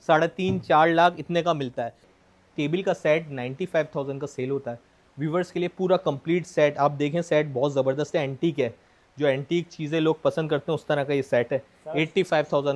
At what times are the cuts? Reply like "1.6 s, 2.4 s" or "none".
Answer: 2.1 s